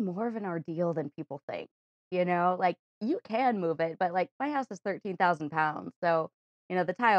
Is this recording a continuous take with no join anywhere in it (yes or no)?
yes